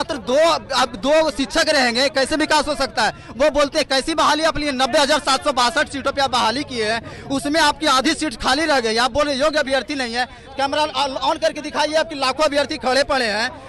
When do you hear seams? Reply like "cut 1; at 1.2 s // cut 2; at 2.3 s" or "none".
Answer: none